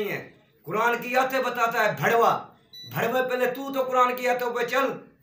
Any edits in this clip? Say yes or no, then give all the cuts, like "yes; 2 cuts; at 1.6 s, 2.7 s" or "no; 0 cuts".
no; 0 cuts